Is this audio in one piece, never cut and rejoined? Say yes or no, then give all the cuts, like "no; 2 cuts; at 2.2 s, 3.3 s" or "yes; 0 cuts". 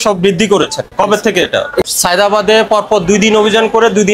no; 1 cut; at 1.9 s